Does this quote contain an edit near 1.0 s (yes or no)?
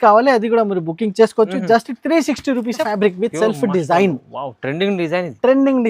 no